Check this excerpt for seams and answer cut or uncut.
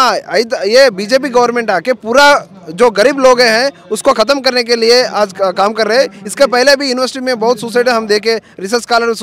uncut